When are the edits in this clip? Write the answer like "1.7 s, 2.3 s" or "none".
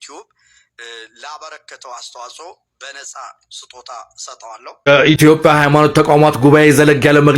4.7 s